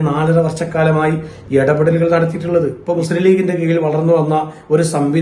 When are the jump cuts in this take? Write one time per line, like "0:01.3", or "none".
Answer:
0:02.8